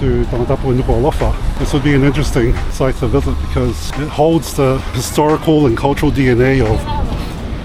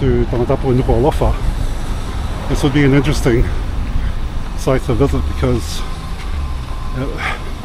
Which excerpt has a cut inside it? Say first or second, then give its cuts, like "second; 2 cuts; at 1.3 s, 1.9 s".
first; 4 cuts; at 1.5 s, 2.6 s, 3.9 s, 5.0 s